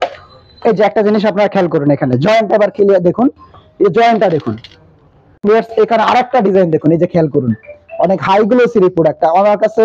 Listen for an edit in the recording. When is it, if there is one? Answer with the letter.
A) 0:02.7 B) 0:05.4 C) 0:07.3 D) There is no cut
B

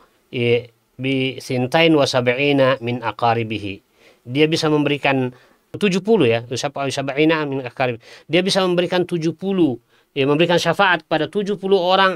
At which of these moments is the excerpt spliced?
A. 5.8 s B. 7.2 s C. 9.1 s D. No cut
A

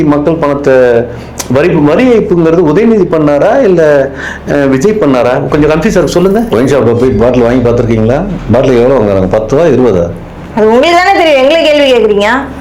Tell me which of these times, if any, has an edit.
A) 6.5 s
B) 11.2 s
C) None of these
A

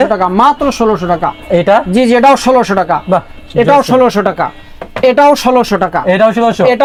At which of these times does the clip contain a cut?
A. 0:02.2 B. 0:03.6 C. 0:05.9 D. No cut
D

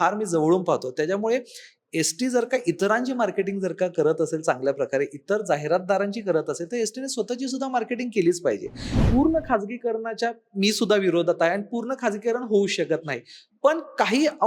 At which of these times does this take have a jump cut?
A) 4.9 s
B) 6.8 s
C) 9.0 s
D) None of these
C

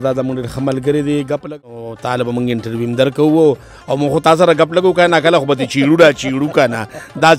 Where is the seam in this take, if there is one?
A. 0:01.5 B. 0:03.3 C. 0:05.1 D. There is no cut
A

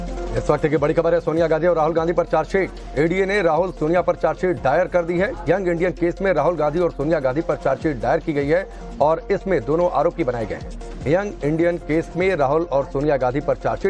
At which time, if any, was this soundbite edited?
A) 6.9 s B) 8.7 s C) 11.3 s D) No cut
A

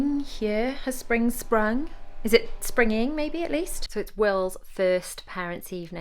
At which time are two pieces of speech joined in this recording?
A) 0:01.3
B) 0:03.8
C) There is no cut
B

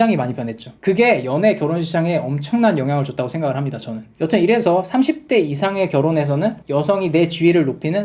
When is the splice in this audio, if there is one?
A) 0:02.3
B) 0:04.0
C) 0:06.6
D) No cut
B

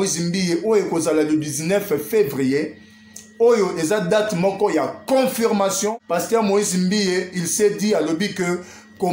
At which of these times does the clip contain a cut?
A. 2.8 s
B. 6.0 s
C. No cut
B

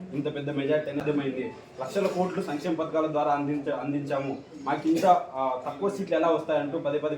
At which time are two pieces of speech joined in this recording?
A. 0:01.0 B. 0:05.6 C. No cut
A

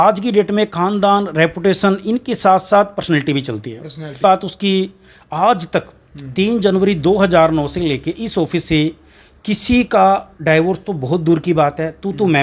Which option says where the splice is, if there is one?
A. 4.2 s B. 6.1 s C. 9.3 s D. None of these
A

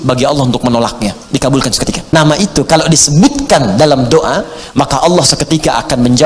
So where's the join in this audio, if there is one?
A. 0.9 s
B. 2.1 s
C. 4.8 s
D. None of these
B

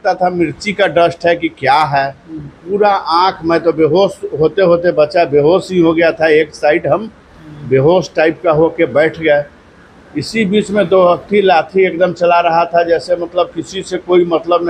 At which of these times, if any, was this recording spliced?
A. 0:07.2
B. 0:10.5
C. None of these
C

